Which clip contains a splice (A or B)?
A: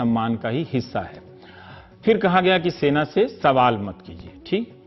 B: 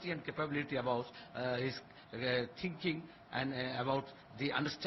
A